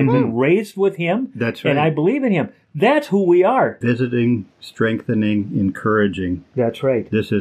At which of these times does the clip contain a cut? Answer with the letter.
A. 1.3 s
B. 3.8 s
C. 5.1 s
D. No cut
B